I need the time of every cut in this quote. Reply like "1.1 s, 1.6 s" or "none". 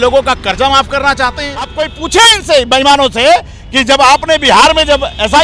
1.8 s